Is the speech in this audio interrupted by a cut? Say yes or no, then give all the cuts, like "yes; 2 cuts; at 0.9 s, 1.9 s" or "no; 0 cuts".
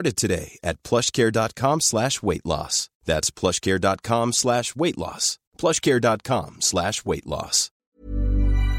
yes; 1 cut; at 7.6 s